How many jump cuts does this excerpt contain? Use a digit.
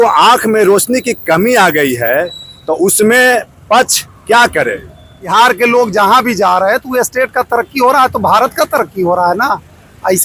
1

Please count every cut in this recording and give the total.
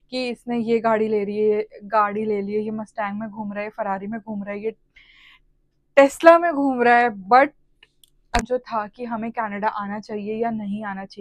1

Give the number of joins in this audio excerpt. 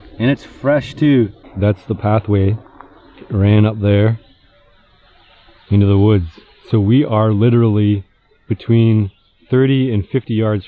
1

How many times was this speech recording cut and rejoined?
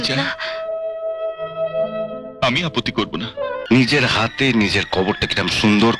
1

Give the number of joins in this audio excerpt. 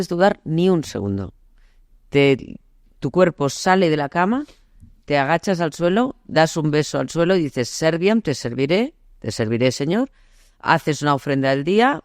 0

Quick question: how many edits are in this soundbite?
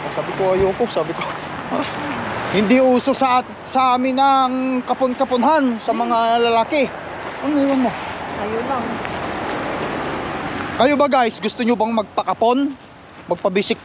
0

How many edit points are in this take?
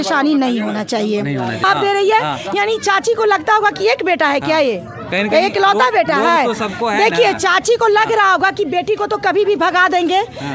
1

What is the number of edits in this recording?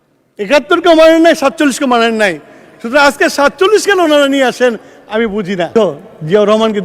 1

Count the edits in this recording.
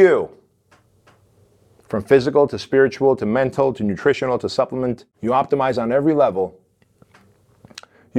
1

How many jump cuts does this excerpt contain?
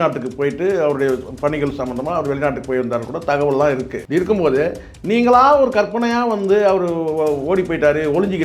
1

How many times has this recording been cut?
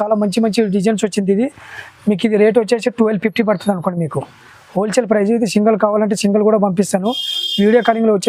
0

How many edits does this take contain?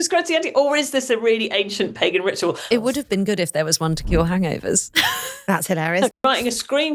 2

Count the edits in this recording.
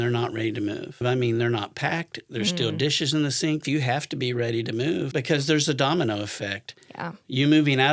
3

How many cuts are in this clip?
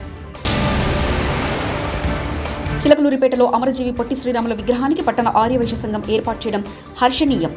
0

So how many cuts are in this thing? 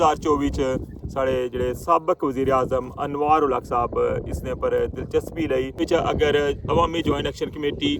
1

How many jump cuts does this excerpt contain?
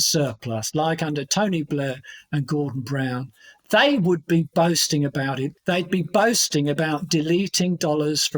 1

